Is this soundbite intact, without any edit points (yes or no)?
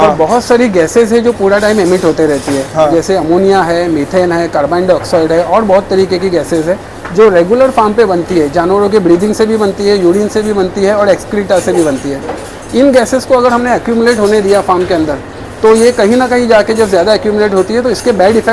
yes